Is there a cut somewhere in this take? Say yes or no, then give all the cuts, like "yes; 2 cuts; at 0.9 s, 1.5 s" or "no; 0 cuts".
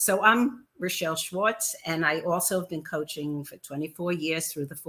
no; 0 cuts